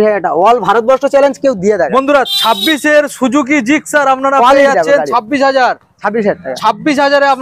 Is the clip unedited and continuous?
yes; 0 cuts

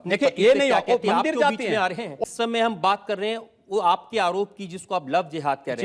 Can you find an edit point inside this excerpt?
yes; 1 cut; at 2.2 s

